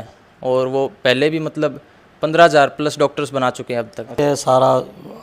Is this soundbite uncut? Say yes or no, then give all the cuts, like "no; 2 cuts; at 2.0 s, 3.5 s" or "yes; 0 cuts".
no; 1 cut; at 4.2 s